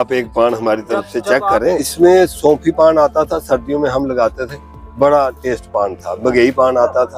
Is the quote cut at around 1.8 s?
yes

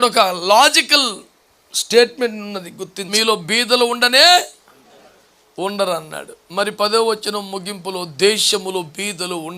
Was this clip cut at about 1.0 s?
no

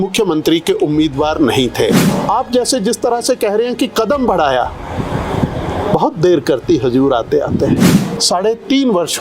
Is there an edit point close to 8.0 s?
yes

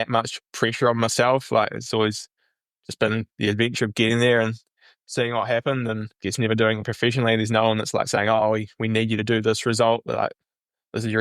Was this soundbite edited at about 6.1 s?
yes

